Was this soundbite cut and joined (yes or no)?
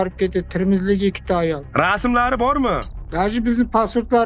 yes